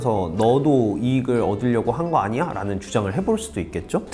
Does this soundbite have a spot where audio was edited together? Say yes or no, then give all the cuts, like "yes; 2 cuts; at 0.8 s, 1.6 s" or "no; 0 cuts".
no; 0 cuts